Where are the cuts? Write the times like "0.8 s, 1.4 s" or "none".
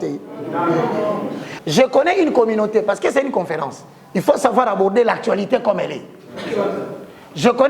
1.5 s

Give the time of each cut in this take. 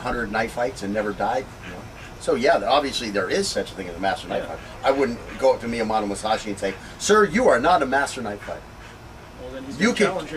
5.9 s

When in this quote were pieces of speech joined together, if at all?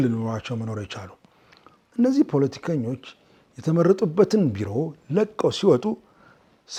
none

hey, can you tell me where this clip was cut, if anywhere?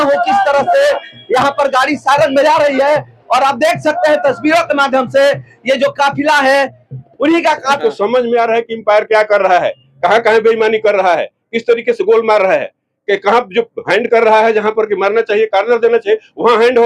7.8 s

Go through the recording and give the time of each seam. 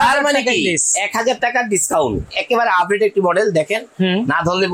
2.3 s

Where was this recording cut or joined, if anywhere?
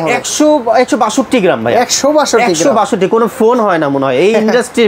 none

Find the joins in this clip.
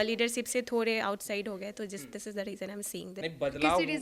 3.0 s

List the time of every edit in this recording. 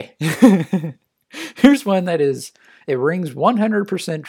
none

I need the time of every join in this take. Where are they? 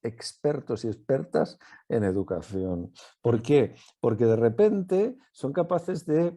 none

